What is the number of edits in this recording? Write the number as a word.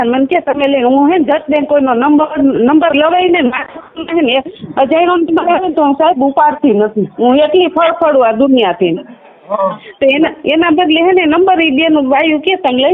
zero